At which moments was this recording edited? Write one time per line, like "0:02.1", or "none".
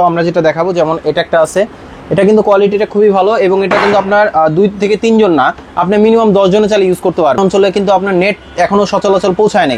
0:07.4